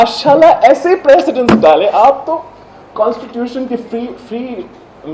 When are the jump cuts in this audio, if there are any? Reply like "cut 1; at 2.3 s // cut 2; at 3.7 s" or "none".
none